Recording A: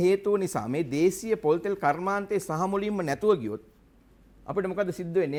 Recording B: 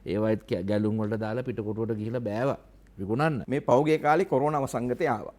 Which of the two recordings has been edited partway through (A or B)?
B